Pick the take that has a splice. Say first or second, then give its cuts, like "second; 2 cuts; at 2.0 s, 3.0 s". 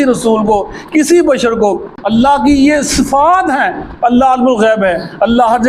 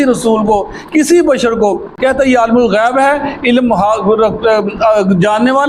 first; 1 cut; at 1.9 s